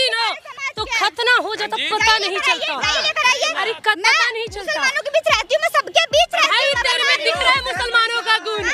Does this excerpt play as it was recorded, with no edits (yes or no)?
yes